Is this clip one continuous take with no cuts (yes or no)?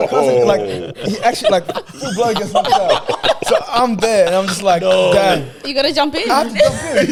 yes